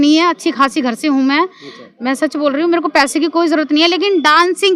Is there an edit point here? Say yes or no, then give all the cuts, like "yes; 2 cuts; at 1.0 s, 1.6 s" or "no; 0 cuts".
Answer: no; 0 cuts